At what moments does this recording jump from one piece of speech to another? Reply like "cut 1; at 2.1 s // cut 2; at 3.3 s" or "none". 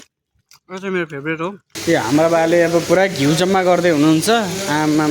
cut 1; at 1.7 s